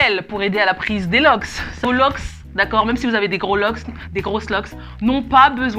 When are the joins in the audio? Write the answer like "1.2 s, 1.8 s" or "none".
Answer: 1.6 s